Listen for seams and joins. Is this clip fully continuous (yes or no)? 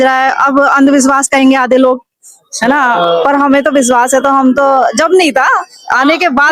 yes